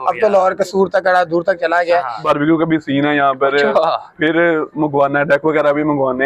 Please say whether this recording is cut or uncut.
cut